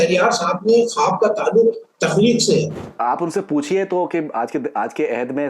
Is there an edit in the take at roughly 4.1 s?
no; 1 cut; at 2.9 s

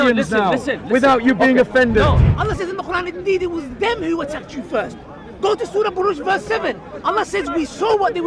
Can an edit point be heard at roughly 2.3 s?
yes; 1 cut; at 2.3 s

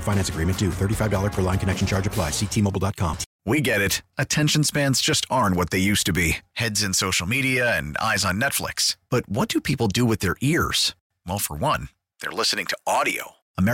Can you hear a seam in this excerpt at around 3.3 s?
yes; 1 cut; at 3.3 s

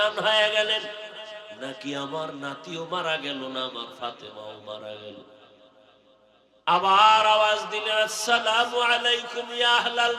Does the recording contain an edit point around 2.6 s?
no; 0 cuts

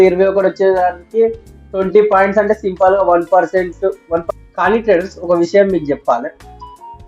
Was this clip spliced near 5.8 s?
no; 1 cut; at 4.2 s

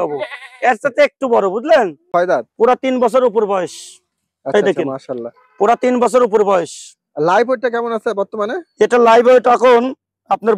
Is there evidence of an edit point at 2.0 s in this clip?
yes; 1 cut; at 2.0 s

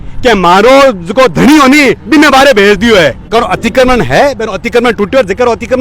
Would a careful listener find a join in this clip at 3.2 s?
yes; 1 cut; at 3.2 s

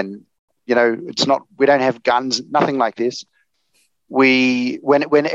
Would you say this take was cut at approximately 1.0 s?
no; 0 cuts

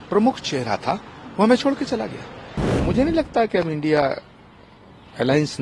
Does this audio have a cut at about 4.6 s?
no; 1 cut; at 2.7 s

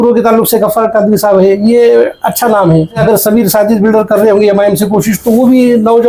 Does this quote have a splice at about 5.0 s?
no; 1 cut; at 3.0 s

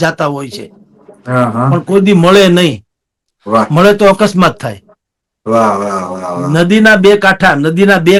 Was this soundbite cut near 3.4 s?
no; 0 cuts

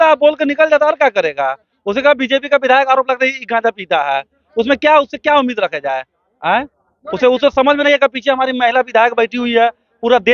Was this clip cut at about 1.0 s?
no; 0 cuts

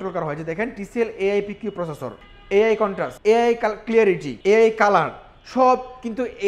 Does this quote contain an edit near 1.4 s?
no; 2 cuts; at 3.1 s, 4.3 s

